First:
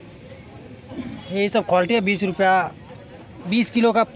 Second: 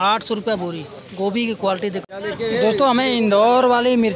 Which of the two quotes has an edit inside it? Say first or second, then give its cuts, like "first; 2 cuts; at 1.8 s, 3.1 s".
second; 1 cut; at 2.0 s